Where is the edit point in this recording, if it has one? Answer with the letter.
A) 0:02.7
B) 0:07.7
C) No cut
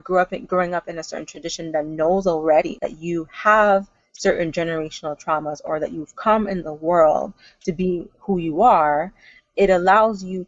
A